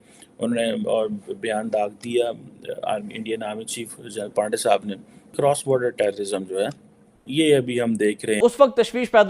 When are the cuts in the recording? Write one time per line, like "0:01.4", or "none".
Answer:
0:05.3
0:08.4